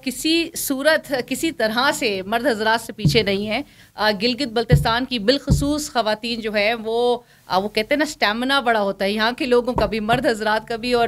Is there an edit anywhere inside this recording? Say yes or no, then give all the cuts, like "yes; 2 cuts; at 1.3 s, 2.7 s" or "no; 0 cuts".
no; 0 cuts